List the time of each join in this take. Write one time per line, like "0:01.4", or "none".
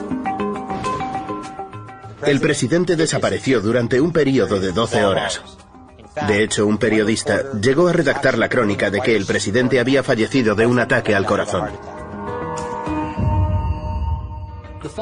none